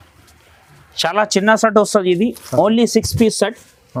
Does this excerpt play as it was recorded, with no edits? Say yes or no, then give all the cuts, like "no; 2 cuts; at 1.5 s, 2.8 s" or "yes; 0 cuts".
yes; 0 cuts